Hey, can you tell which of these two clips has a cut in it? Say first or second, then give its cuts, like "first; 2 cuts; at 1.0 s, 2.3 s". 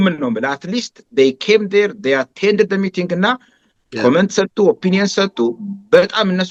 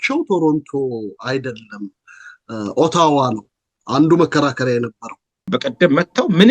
second; 1 cut; at 5.4 s